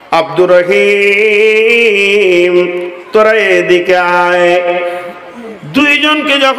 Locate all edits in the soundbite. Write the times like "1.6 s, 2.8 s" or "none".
none

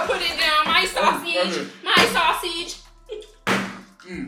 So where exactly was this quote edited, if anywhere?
none

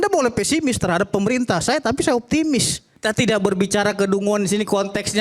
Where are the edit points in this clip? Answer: 2.8 s

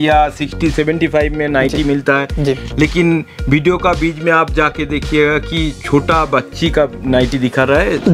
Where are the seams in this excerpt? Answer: none

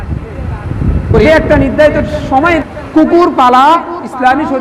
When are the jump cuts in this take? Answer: 2.6 s

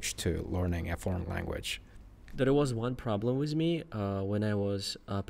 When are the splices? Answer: 2.3 s

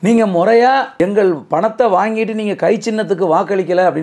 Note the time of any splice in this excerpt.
0.9 s

